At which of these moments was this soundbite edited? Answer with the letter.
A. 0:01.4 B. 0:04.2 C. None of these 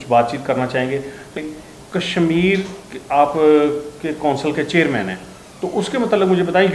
A